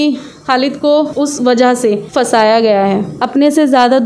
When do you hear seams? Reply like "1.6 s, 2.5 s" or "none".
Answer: 1.1 s, 2.1 s, 3.2 s